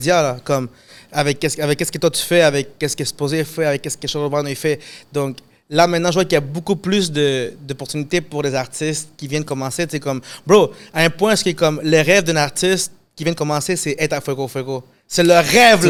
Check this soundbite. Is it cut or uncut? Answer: uncut